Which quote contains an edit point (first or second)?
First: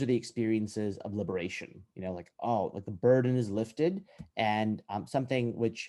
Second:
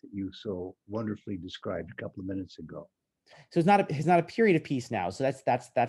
second